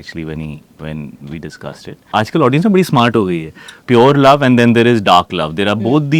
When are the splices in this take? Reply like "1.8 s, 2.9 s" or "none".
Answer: 2.1 s, 3.8 s